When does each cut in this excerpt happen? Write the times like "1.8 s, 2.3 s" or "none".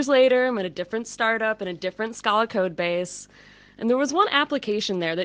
4.0 s